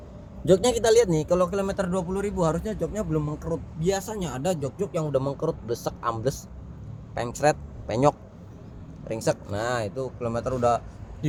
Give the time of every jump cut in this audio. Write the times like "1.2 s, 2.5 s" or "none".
none